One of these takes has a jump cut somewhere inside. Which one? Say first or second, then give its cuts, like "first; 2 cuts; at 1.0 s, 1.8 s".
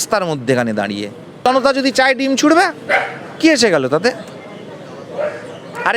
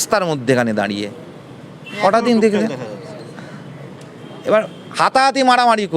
first; 1 cut; at 1.5 s